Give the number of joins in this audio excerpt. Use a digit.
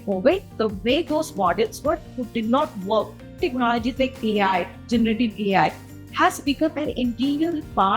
1